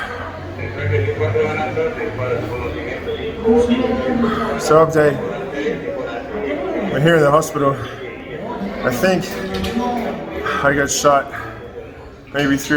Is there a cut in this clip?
no; 0 cuts

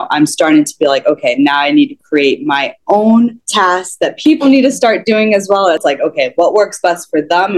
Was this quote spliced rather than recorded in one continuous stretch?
yes; 2 cuts; at 3.7 s, 5.8 s

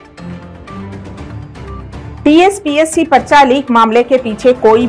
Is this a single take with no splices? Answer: no; 1 cut; at 2.2 s

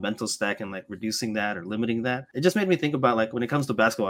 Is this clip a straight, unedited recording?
no; 1 cut; at 2.3 s

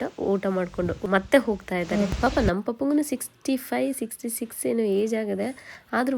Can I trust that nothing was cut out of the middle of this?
no; 2 cuts; at 1.0 s, 2.1 s

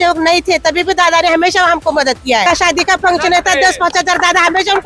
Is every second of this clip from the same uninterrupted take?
no; 1 cut; at 2.4 s

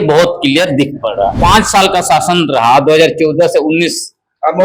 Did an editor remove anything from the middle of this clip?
yes; 1 cut; at 1.3 s

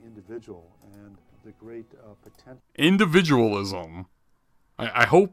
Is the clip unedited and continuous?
yes; 0 cuts

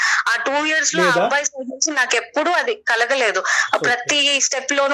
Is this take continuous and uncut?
yes; 0 cuts

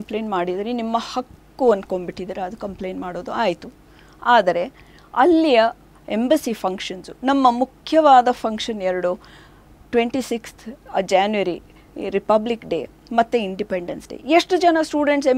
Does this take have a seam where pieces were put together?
no; 0 cuts

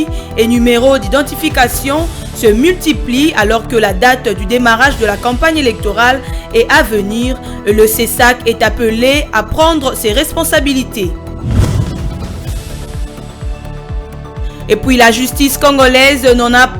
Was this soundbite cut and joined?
no; 0 cuts

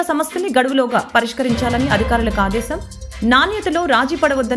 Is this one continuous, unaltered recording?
yes; 0 cuts

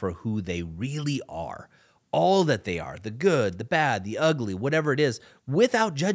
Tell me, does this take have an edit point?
no; 0 cuts

